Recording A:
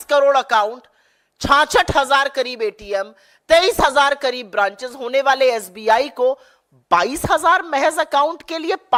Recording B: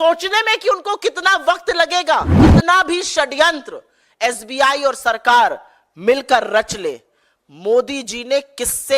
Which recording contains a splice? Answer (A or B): B